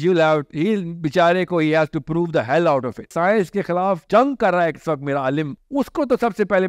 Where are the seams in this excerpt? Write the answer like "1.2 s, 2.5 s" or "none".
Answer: 3.1 s, 4.0 s, 5.6 s